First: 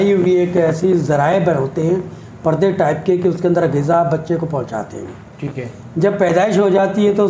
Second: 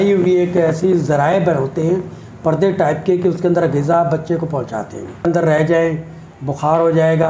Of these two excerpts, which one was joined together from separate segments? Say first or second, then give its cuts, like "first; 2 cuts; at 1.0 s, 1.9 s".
second; 1 cut; at 5.2 s